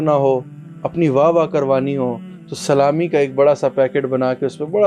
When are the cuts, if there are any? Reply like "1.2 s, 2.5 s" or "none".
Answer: none